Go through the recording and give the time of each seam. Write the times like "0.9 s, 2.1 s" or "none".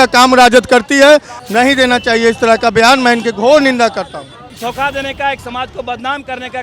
1.3 s, 4.3 s

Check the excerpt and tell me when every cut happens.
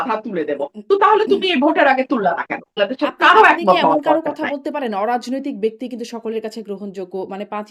2.8 s

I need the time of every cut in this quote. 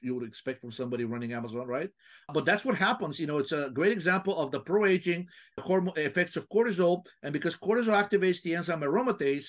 2.3 s, 5.6 s

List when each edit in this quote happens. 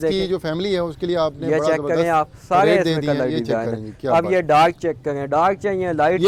none

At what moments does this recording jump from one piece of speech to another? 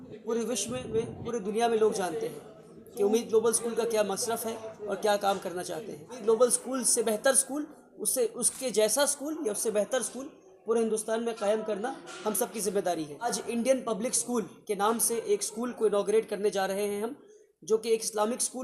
6.2 s, 13.4 s

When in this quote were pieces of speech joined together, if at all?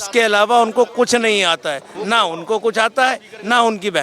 none

